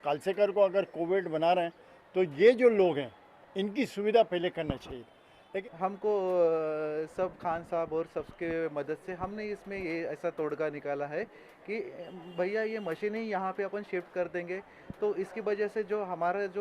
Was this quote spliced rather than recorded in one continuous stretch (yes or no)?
yes